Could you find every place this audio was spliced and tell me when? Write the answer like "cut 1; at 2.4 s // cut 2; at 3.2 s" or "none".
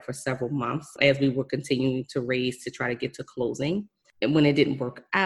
cut 1; at 0.9 s // cut 2; at 4.0 s